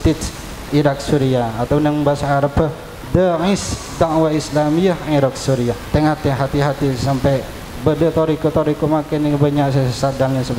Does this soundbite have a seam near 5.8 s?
yes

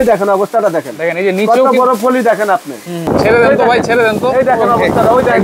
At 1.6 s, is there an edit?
no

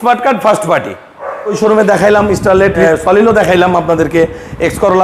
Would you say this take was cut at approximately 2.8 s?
yes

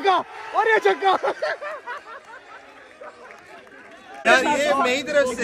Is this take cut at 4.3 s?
yes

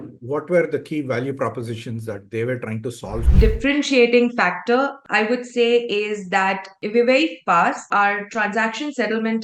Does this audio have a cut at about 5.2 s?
no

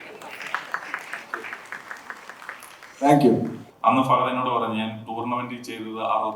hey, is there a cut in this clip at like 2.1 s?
no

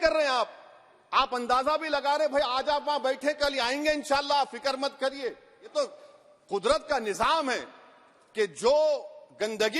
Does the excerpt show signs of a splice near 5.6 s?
yes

